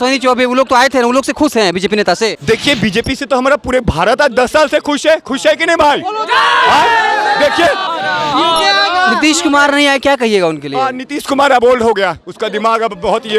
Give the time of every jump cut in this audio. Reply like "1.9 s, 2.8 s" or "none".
2.4 s, 7.9 s